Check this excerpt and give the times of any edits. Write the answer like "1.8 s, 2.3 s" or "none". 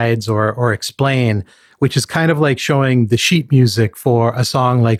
none